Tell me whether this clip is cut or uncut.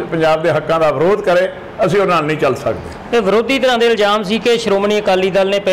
uncut